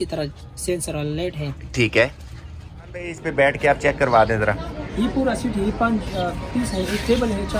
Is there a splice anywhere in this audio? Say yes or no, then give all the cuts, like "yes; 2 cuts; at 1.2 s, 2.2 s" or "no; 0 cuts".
yes; 1 cut; at 3.2 s